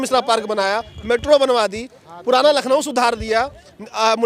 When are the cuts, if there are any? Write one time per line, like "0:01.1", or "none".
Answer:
none